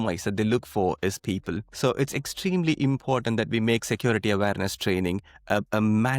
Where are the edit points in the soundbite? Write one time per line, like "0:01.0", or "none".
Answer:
0:01.7